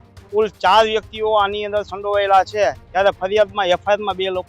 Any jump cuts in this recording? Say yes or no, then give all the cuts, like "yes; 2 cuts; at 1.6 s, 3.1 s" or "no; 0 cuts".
no; 0 cuts